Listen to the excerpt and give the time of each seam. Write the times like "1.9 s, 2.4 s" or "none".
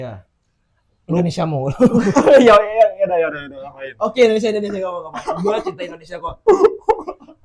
none

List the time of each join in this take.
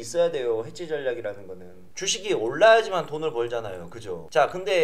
1.9 s

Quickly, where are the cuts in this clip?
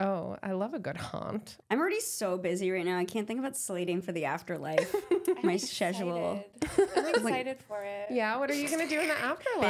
1.5 s

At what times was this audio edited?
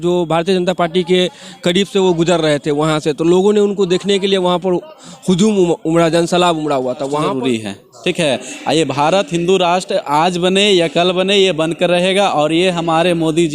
7.3 s

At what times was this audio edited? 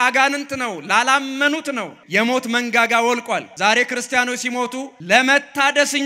1.9 s, 3.5 s, 4.9 s

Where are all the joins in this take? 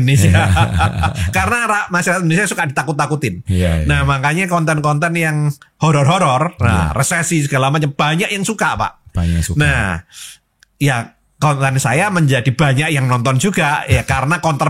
none

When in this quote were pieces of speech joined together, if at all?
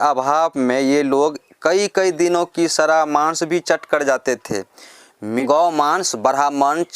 5.2 s

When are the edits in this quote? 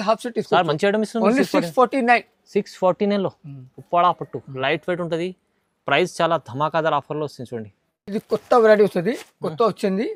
none

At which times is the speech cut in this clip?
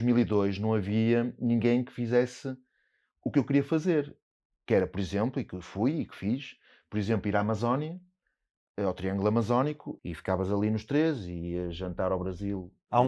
9.9 s

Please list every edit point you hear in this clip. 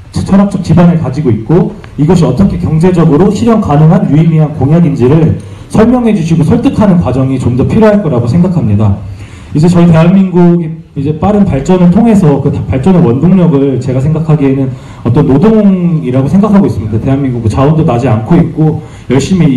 10.9 s

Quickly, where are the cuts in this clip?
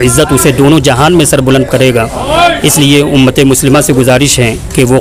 none

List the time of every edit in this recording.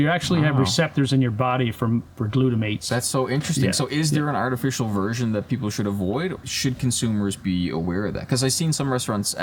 2.8 s, 6.3 s

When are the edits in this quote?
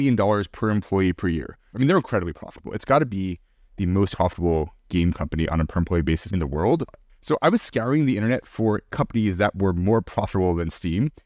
1.6 s, 7.0 s

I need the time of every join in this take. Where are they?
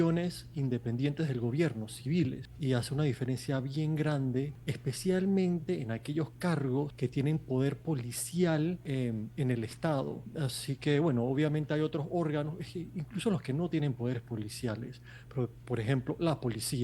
2.5 s, 4.6 s, 6.9 s, 8.8 s, 10.2 s

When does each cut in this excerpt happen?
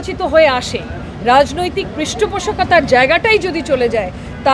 none

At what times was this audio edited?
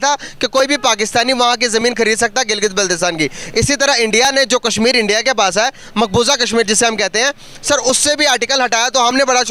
none

